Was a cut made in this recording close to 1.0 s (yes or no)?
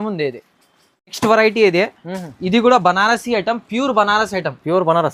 no